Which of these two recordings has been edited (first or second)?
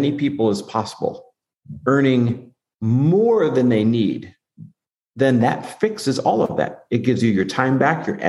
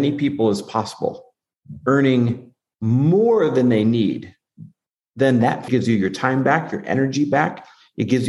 second